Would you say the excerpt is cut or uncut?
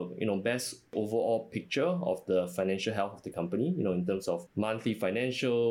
cut